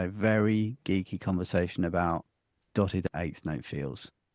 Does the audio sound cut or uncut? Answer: cut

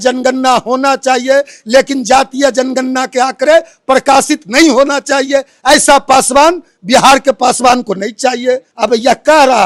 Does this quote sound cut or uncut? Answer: uncut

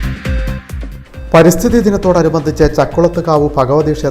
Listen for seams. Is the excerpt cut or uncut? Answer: cut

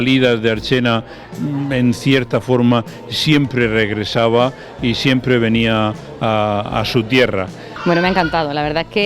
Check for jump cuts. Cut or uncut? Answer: cut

